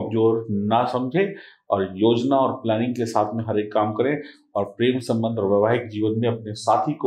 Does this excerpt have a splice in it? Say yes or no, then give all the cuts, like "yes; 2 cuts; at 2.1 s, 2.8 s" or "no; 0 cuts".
no; 0 cuts